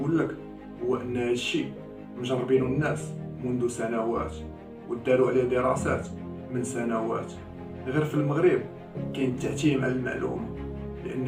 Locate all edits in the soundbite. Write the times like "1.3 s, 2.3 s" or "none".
none